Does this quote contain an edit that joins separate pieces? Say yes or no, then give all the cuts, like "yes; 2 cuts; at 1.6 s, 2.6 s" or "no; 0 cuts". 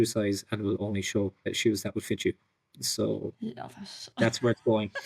yes; 1 cut; at 1.5 s